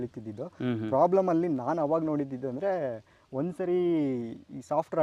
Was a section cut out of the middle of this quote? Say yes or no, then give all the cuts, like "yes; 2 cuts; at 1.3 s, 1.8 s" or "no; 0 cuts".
no; 0 cuts